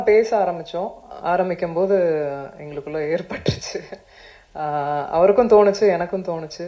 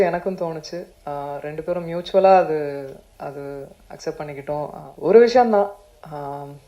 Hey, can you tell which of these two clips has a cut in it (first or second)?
second